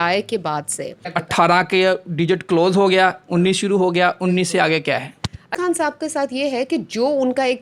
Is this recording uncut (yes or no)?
no